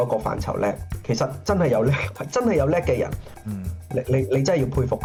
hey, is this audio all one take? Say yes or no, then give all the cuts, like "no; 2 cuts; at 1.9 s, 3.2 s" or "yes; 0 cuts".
yes; 0 cuts